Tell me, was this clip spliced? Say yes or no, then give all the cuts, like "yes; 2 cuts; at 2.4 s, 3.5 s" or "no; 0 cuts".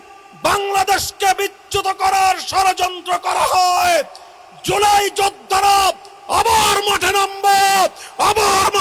no; 0 cuts